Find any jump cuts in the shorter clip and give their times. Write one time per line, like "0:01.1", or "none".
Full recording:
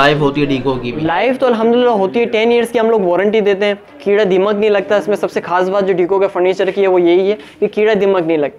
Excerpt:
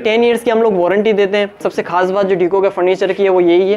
0:01.7